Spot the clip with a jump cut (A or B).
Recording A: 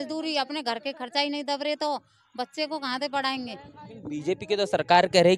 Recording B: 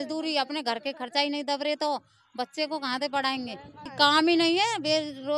B